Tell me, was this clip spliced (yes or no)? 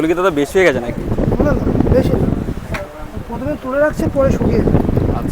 no